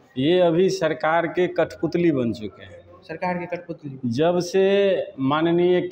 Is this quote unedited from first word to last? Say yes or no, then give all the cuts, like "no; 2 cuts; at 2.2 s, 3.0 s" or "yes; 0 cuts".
yes; 0 cuts